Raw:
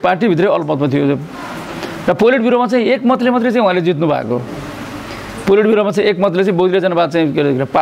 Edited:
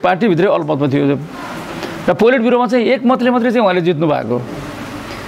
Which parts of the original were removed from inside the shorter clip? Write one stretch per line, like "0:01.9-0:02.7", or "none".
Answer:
none

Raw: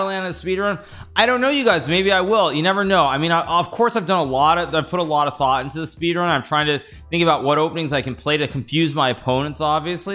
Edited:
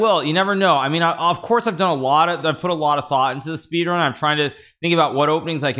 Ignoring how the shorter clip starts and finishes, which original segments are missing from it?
none

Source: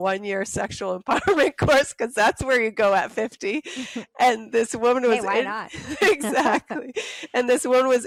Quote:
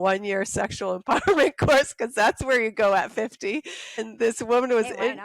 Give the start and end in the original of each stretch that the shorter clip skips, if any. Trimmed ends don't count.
0:04.1-0:04.4

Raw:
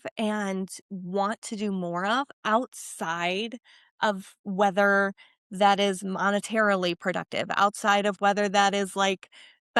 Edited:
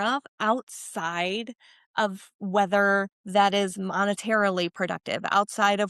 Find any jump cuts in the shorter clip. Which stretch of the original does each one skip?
0:05.2-0:05.4

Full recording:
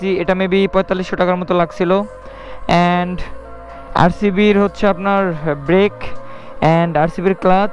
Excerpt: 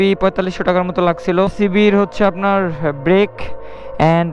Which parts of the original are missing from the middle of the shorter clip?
0:02.1-0:04.2

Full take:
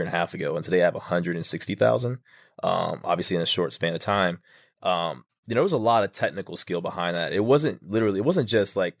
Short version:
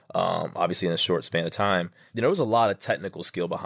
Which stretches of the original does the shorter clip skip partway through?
0:04.5-0:05.3

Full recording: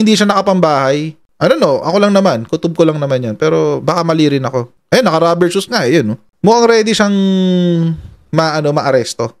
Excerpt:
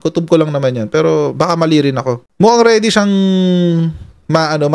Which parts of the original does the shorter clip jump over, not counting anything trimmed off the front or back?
0:04.7-0:06.3

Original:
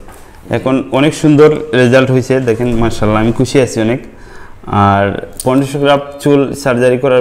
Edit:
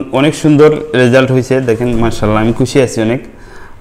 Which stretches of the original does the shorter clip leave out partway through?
none

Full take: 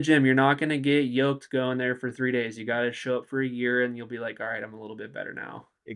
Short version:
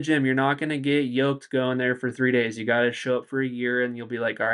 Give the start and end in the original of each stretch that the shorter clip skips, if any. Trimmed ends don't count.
none

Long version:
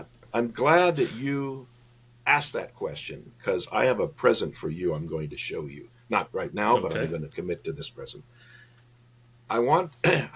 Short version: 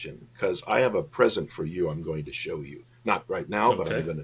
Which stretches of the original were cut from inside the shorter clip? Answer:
none

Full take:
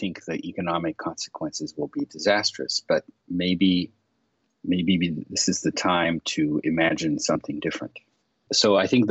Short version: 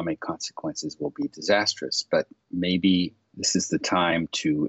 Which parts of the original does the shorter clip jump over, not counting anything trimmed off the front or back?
0:04.1-0:05.3

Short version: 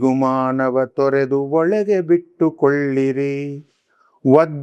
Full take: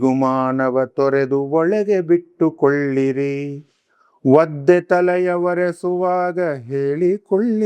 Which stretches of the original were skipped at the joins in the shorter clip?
none

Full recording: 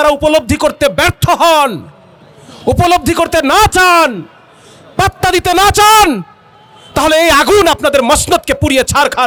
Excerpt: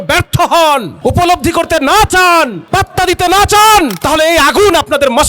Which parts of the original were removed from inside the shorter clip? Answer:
0:01.8-0:02.5
0:04.2-0:04.8
0:06.2-0:06.9

